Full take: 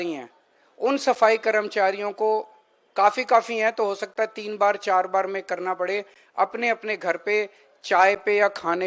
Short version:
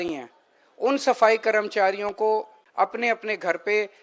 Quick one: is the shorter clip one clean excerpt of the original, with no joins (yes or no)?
no